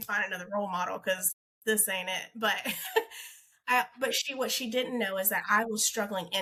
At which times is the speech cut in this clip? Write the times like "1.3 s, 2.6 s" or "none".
none